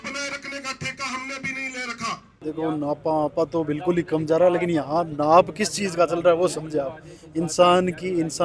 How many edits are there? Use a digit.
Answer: 1